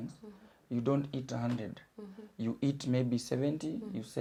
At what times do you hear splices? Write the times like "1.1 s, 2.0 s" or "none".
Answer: none